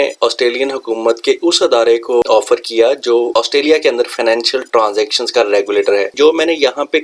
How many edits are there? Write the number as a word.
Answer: two